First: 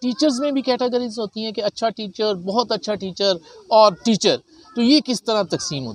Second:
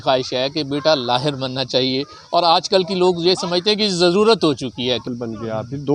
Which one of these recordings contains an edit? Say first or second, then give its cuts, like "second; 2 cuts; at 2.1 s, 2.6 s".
second; 1 cut; at 5.0 s